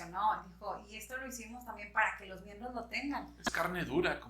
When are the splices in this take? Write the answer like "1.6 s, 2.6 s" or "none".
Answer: 3.3 s